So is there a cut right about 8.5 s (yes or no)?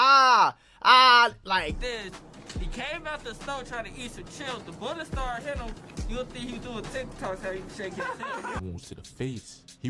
yes